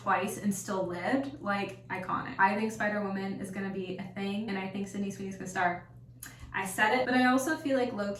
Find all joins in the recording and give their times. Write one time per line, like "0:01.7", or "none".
0:02.3
0:07.1

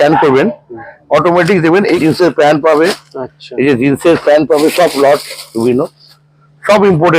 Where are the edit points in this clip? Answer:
0:02.0

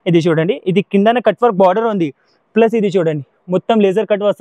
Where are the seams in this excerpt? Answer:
none

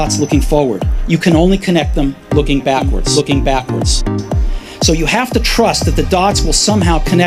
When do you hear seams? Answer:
none

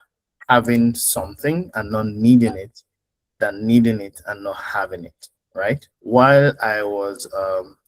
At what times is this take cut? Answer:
0:05.9

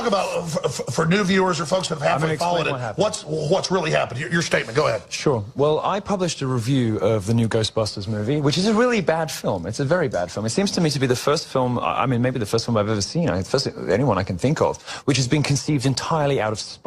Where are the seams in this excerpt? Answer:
0:07.1

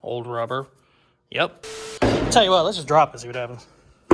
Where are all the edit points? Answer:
0:01.6

